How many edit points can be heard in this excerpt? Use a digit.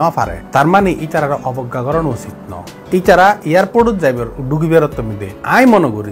0